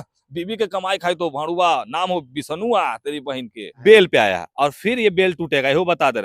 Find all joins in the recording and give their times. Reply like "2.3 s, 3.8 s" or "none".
3.7 s